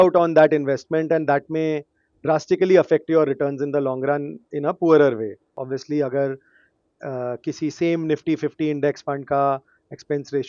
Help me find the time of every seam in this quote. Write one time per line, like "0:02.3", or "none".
0:05.6